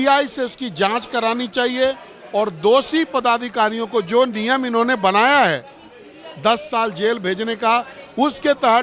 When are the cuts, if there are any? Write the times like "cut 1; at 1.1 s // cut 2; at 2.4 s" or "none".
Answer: none

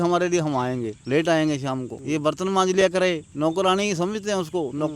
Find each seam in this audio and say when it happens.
cut 1; at 1.0 s // cut 2; at 1.9 s // cut 3; at 3.3 s

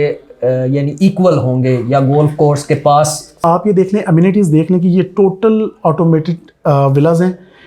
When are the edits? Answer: cut 1; at 3.4 s

